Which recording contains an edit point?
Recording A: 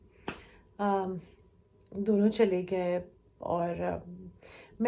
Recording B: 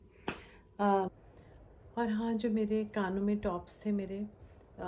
B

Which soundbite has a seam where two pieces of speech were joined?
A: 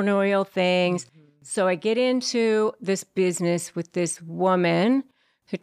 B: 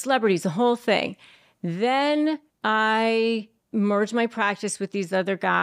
B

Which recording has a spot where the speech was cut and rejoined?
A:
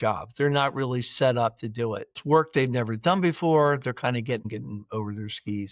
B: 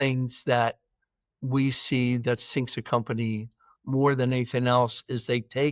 A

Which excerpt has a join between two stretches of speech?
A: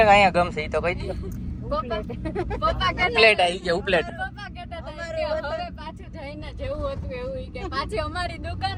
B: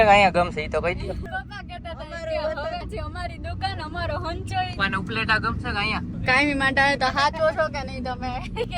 B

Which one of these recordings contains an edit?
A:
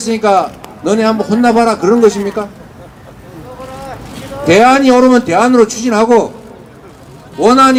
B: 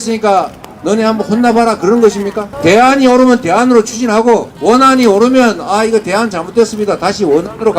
B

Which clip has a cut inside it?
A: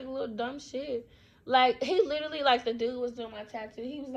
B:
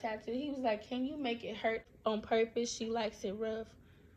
B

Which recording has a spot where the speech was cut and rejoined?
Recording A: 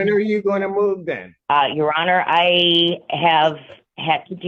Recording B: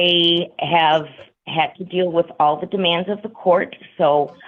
A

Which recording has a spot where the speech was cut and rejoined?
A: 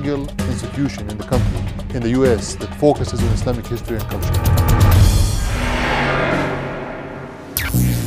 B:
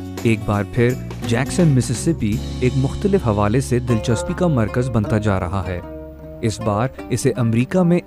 B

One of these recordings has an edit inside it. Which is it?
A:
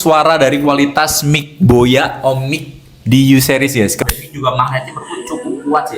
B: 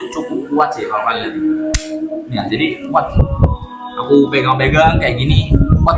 A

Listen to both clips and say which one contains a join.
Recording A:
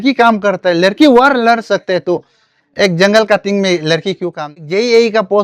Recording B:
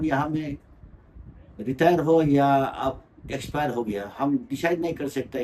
A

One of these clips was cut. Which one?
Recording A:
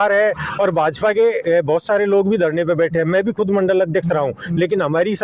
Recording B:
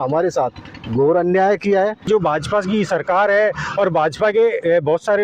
B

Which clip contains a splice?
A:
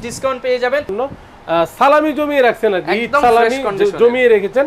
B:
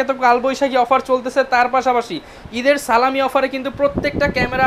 A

